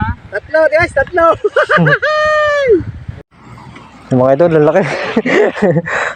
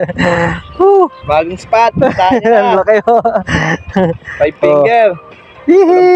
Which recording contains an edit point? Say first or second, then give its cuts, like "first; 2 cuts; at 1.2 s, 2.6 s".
first; 1 cut; at 3.3 s